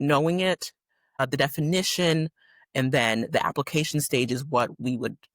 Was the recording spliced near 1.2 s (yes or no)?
yes